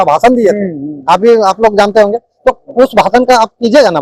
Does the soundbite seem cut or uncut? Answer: uncut